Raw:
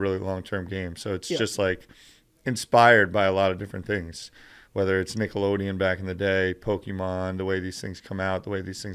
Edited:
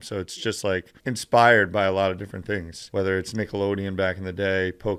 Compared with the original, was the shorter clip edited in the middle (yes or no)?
yes